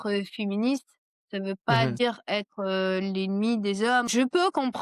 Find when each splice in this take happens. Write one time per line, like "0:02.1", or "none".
0:01.9
0:04.1